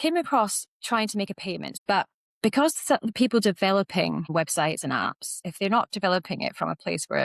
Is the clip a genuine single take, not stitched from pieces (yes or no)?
yes